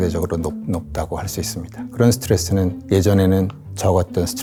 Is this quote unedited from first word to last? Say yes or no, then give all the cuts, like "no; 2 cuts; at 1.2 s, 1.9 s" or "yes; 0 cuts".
yes; 0 cuts